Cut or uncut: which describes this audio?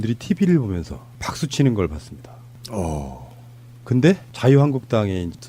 uncut